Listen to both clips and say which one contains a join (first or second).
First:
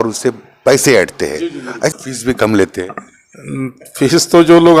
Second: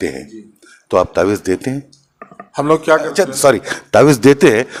first